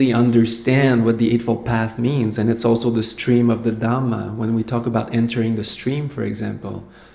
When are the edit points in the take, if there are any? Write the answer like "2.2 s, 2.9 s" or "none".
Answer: none